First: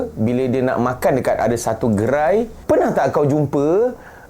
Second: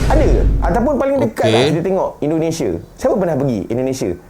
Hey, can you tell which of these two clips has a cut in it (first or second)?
first